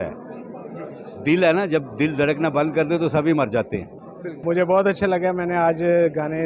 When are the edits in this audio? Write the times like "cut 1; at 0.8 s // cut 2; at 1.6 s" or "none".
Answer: cut 1; at 4.4 s